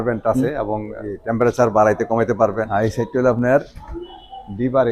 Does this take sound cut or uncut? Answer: cut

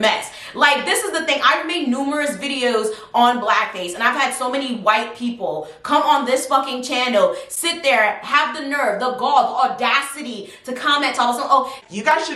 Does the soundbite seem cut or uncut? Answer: uncut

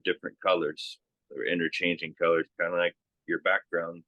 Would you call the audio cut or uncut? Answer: uncut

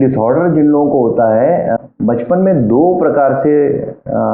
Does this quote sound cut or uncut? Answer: cut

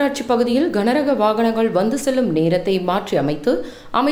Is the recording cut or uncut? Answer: uncut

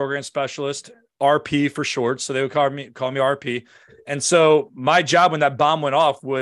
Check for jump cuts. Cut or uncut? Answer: uncut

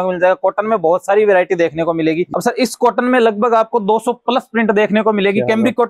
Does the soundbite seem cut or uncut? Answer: cut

